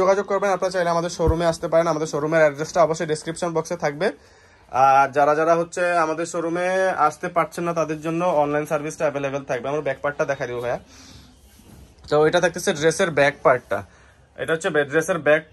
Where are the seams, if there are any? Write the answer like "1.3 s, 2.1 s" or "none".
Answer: none